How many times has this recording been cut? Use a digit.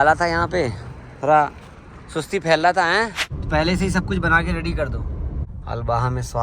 1